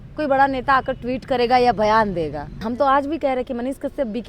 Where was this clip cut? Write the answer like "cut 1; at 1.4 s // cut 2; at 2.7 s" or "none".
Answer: cut 1; at 2.6 s